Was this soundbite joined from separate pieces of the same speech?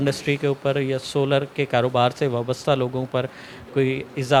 no; 0 cuts

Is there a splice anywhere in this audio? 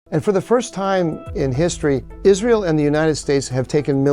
yes; 1 cut; at 1.6 s

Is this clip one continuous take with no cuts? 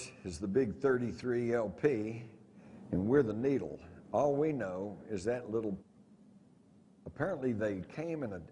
yes; 0 cuts

